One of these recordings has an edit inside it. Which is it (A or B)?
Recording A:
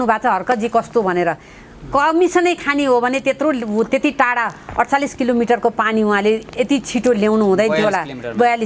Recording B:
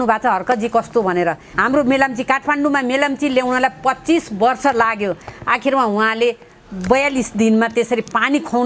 B